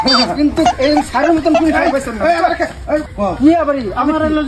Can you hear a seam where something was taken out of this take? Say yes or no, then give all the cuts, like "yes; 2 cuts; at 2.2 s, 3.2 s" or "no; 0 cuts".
yes; 1 cut; at 3.1 s